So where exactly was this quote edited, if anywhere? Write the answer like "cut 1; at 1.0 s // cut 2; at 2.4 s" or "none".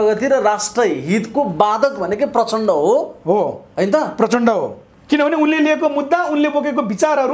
none